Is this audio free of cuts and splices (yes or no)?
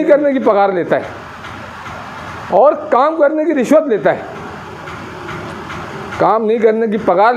yes